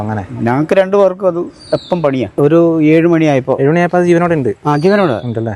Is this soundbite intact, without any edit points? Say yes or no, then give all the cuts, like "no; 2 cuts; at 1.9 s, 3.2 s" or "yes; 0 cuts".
no; 1 cut; at 2.3 s